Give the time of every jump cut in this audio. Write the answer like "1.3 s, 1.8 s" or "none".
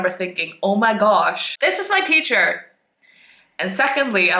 1.5 s